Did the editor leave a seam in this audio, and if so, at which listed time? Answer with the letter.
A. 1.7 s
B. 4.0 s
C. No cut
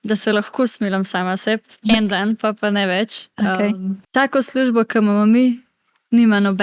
B